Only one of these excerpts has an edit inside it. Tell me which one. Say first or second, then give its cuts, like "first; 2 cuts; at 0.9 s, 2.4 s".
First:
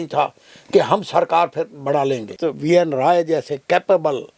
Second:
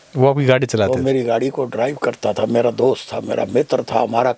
first; 1 cut; at 2.4 s